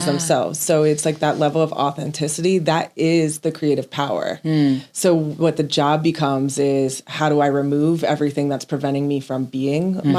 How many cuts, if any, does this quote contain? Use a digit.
0